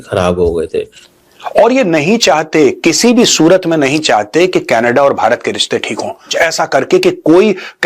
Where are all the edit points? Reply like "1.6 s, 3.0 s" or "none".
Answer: 1.0 s, 6.3 s